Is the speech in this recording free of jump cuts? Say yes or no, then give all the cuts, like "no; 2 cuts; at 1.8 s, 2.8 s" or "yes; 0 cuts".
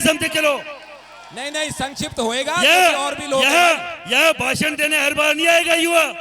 yes; 0 cuts